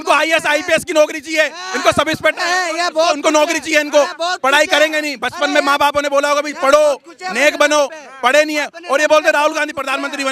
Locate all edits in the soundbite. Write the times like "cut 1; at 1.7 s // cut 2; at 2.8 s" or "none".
none